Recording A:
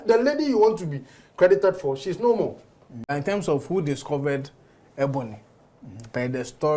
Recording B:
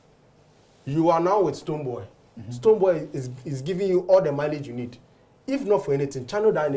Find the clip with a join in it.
A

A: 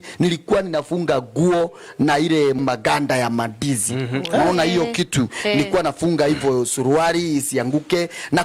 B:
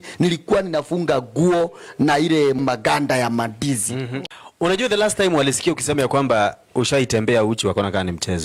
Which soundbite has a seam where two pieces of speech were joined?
B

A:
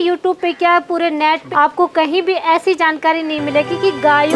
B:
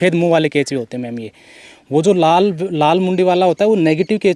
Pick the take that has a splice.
A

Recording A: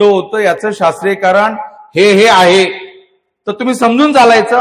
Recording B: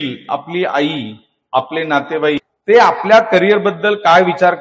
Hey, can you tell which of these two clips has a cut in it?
B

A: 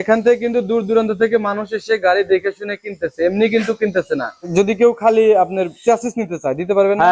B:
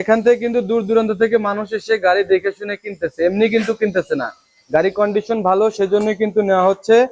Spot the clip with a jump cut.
A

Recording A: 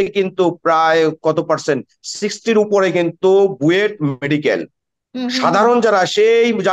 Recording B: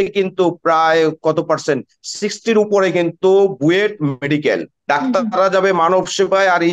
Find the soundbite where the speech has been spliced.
B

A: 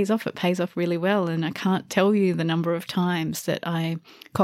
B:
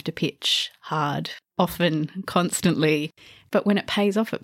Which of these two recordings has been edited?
B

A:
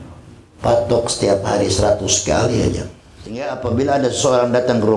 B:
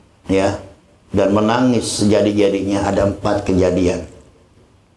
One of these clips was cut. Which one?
A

